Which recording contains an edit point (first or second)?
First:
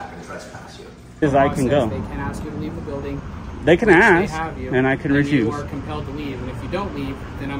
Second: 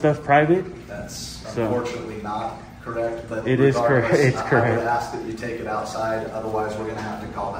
first